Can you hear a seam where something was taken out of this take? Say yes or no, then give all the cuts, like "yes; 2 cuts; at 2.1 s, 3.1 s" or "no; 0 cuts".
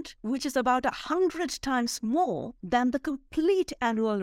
no; 0 cuts